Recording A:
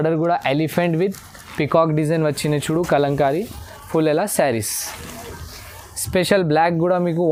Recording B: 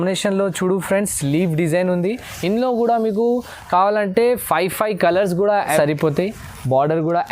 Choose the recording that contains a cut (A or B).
B